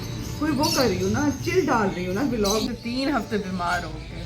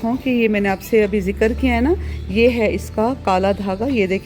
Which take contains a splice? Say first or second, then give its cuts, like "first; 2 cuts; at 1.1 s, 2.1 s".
first; 1 cut; at 2.6 s